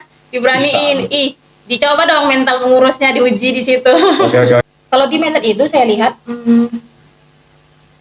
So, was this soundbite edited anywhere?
yes; 1 cut; at 4.6 s

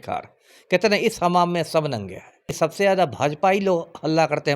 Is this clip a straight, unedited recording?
no; 1 cut; at 2.5 s

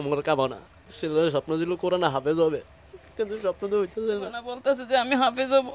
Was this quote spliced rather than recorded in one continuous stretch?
yes; 1 cut; at 4.5 s

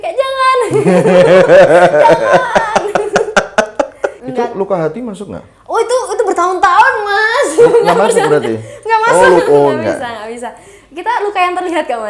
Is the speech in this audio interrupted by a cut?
yes; 1 cut; at 4.2 s

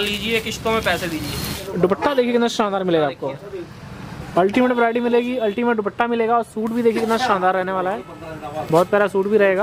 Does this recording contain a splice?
yes; 1 cut; at 1.6 s

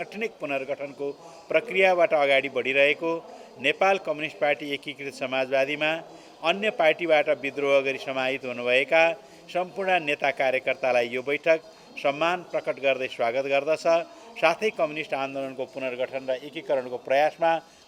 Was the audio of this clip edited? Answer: no; 0 cuts

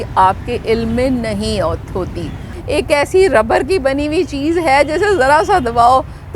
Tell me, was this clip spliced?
yes; 1 cut; at 2.5 s

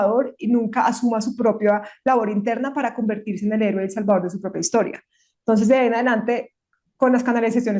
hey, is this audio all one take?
yes; 0 cuts

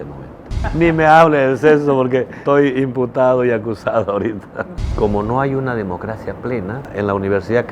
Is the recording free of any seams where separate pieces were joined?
no; 4 cuts; at 0.7 s, 2.4 s, 4.6 s, 6.9 s

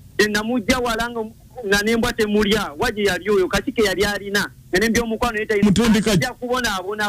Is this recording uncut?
no; 1 cut; at 5.6 s

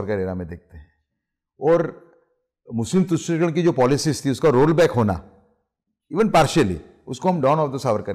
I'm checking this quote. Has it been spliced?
no; 0 cuts

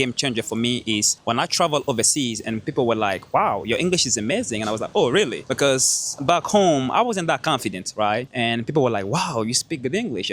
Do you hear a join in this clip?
yes; 3 cuts; at 1.1 s, 5.4 s, 8.3 s

